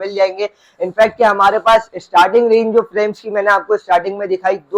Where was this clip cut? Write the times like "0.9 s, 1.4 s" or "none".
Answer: none